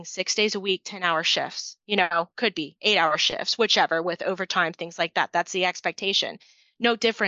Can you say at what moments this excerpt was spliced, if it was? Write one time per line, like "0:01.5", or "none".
none